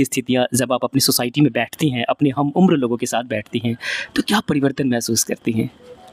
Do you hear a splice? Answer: no; 0 cuts

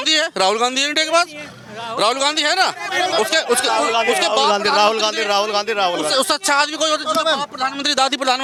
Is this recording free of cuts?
yes; 0 cuts

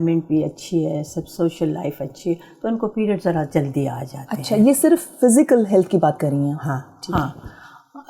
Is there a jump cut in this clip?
no; 0 cuts

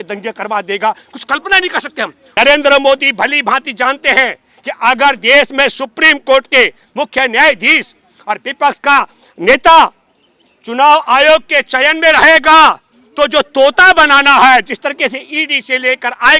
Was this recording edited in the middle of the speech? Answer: yes; 1 cut; at 2.2 s

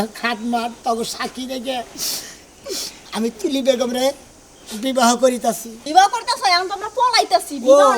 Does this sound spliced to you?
yes; 1 cut; at 5.7 s

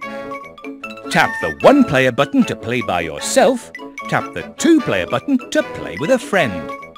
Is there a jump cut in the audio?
yes; 1 cut; at 1.1 s

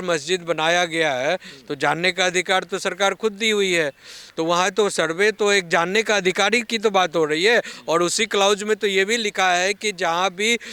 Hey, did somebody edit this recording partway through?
no; 0 cuts

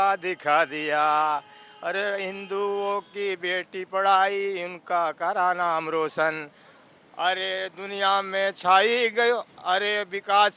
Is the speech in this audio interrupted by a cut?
no; 0 cuts

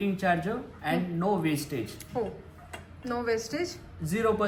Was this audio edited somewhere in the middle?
no; 0 cuts

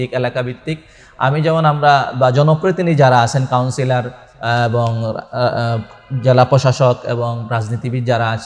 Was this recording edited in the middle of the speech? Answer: no; 0 cuts

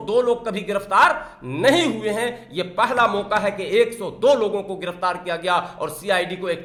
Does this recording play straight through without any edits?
yes; 0 cuts

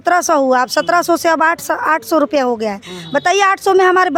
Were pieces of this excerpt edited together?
no; 0 cuts

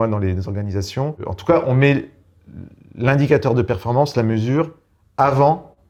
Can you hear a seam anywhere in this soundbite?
no; 0 cuts

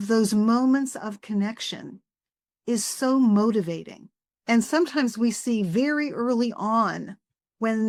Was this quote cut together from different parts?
no; 0 cuts

